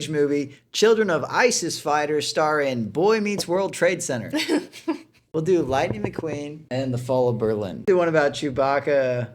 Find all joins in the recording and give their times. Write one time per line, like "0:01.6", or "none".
0:05.2
0:06.5
0:07.8